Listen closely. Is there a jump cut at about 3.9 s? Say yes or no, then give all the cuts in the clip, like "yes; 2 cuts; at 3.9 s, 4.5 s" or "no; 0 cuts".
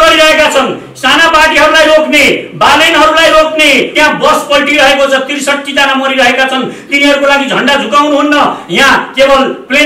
yes; 1 cut; at 3.9 s